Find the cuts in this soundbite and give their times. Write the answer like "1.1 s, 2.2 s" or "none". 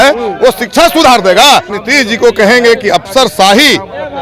1.8 s